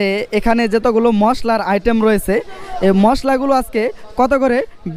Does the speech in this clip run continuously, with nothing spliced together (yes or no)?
yes